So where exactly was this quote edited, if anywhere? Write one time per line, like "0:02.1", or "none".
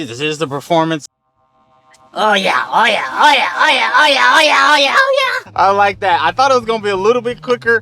none